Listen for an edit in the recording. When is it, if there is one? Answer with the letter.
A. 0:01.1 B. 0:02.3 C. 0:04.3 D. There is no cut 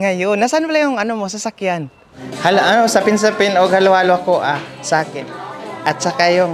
B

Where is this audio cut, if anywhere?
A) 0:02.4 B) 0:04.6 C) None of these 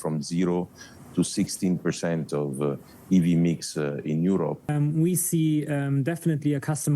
B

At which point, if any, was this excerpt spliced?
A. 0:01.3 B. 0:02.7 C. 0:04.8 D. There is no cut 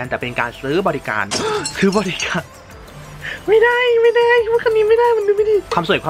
D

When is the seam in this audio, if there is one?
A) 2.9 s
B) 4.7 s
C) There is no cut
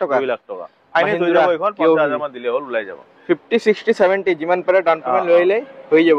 C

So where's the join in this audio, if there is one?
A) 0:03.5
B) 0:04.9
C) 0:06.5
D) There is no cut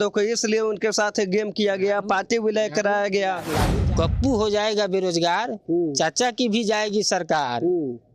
A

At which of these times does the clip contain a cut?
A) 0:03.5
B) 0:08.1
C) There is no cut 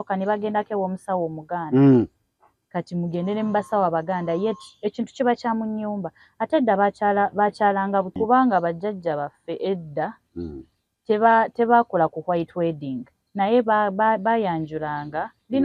B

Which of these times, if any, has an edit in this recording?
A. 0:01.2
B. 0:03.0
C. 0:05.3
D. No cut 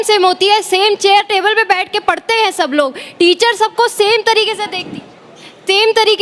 D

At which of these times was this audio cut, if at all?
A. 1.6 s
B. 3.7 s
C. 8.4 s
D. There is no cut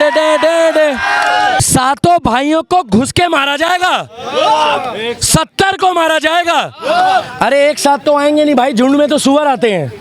A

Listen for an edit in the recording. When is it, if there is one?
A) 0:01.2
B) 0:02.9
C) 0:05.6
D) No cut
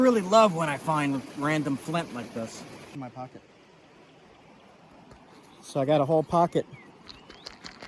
B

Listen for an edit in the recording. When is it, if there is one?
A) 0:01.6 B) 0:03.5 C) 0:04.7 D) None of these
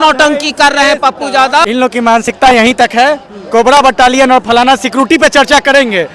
A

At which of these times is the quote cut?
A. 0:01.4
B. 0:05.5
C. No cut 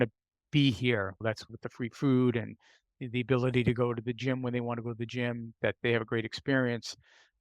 A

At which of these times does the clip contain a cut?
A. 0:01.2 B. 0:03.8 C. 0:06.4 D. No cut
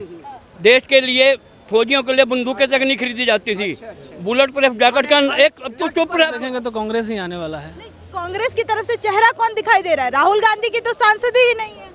C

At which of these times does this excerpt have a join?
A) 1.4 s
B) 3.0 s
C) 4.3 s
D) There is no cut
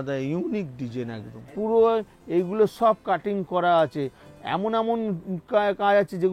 A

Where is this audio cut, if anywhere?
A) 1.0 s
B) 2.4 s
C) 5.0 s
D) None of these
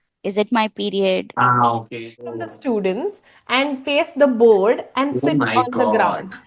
B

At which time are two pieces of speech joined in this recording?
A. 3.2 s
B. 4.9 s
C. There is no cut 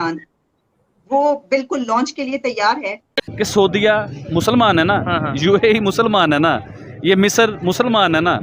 A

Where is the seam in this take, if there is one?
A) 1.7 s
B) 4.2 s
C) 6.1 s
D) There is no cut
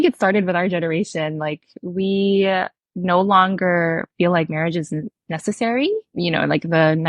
C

